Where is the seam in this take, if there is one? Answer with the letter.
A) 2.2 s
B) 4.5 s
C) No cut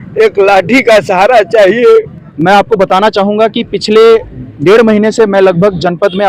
A